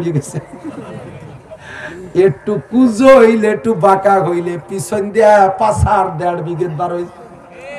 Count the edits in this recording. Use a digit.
0